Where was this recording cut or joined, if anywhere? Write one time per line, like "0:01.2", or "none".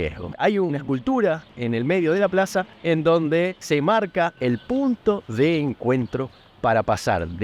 none